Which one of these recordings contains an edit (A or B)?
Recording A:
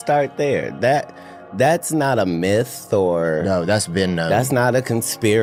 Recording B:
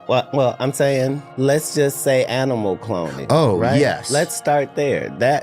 B